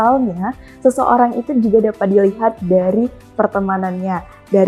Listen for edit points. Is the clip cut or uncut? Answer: uncut